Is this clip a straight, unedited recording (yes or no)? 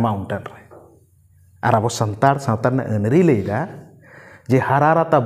yes